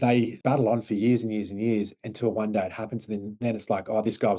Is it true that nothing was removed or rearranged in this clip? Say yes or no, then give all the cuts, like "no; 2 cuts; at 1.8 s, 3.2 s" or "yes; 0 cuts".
yes; 0 cuts